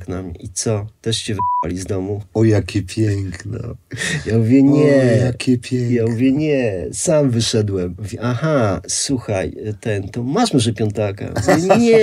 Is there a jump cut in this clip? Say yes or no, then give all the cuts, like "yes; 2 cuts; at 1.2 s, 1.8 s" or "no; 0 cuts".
no; 0 cuts